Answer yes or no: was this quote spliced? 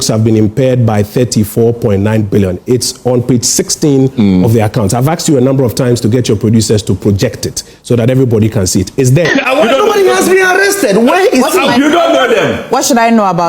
yes